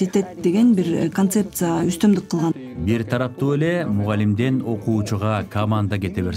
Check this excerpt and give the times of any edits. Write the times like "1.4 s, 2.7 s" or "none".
2.5 s